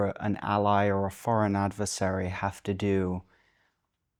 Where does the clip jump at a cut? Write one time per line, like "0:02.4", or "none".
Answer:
none